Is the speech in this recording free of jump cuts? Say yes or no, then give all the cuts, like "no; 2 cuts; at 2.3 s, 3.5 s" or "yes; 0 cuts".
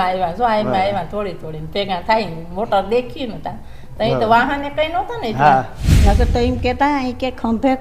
no; 1 cut; at 5.8 s